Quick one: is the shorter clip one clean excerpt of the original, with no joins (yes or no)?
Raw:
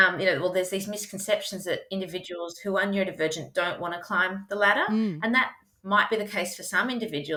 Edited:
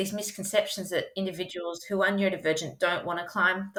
yes